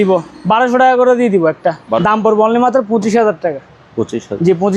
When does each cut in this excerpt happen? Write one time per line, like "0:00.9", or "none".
0:02.0